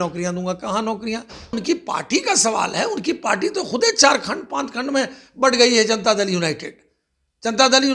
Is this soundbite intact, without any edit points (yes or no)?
no